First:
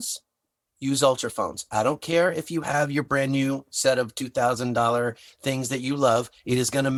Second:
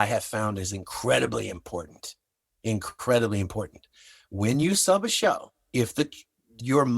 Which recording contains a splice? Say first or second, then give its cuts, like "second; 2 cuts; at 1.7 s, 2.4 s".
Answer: second; 1 cut; at 5.5 s